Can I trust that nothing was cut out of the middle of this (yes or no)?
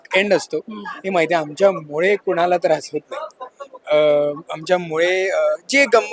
yes